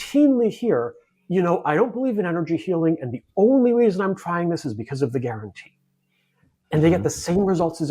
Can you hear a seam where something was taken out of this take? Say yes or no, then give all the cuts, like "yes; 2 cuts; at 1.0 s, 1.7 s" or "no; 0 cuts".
no; 0 cuts